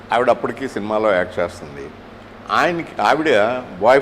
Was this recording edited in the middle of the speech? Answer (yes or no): no